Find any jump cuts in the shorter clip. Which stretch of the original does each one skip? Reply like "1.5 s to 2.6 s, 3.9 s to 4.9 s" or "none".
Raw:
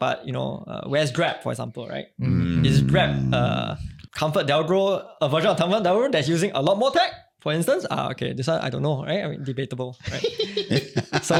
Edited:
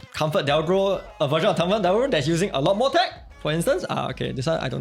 none